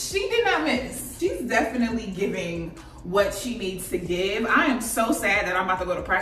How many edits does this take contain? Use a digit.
1